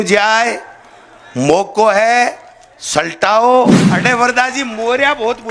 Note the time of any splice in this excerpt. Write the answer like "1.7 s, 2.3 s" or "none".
3.9 s